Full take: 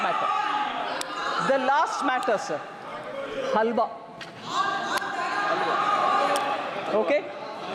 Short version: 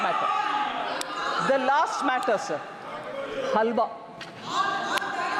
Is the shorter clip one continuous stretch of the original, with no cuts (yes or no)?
yes